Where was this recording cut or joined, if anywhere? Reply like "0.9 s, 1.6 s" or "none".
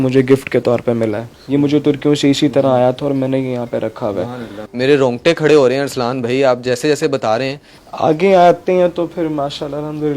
none

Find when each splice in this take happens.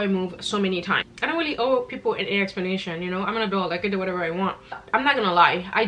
1.1 s, 4.8 s

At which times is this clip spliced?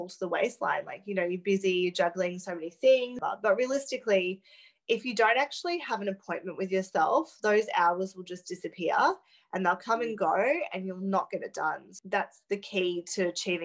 3.2 s, 11.9 s

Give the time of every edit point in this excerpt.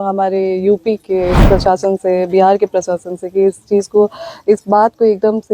1.4 s

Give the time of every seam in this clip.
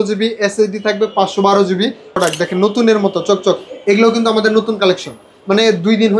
2.2 s

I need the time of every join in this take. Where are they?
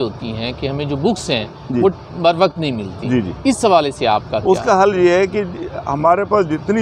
none

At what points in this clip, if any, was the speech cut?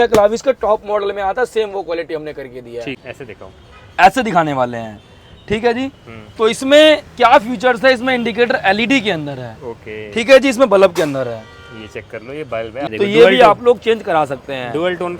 2.9 s, 12.9 s

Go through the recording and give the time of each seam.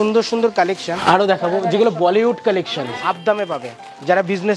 1.0 s, 3.0 s

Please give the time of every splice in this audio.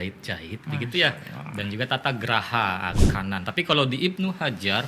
3.0 s

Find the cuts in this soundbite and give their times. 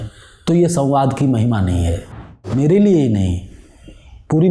2.5 s

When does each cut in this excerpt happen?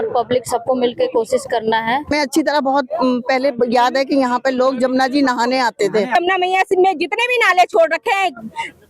2.1 s, 6.1 s

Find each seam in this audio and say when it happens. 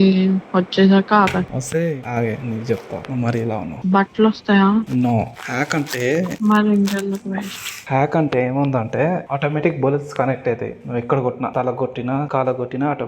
7.7 s

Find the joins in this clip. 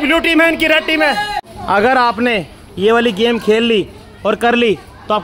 1.5 s

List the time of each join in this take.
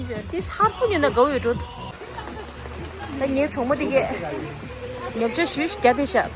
1.9 s

